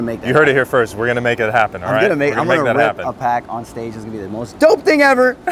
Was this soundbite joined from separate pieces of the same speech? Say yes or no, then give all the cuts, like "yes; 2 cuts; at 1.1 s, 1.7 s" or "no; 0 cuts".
no; 0 cuts